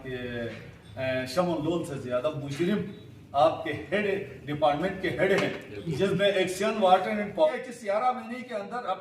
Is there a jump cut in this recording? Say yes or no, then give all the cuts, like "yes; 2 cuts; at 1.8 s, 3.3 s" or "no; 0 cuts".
yes; 1 cut; at 7.5 s